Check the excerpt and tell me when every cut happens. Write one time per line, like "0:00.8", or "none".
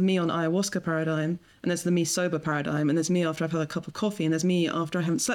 none